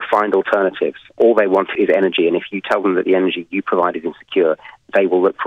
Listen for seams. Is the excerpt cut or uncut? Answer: uncut